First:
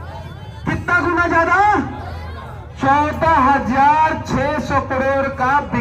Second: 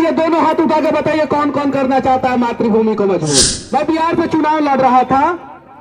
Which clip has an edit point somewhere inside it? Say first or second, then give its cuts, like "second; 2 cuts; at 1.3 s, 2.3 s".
second; 1 cut; at 3.6 s